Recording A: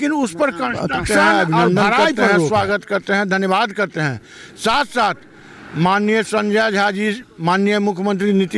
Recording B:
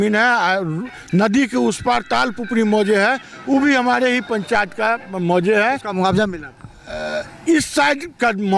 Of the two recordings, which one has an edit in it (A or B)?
A